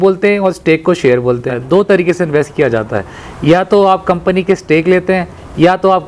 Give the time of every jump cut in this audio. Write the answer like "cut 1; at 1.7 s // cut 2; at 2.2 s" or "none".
cut 1; at 1.9 s